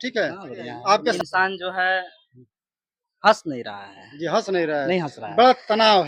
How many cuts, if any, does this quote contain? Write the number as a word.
one